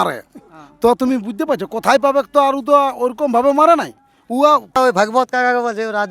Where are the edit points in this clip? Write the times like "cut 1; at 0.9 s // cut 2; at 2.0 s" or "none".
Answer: cut 1; at 4.8 s